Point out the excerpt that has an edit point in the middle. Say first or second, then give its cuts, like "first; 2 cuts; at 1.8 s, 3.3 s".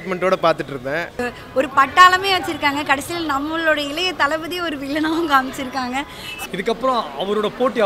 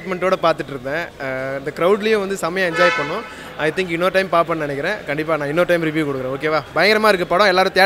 first; 2 cuts; at 1.2 s, 6.2 s